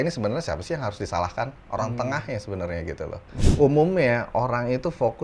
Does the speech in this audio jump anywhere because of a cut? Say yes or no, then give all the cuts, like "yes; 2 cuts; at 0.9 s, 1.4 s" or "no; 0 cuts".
yes; 1 cut; at 3.4 s